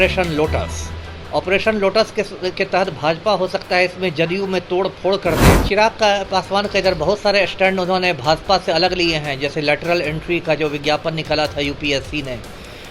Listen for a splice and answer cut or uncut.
cut